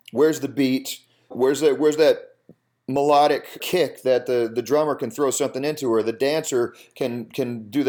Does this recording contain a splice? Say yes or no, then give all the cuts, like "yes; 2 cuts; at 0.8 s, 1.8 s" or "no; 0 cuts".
yes; 2 cuts; at 1.3 s, 3.6 s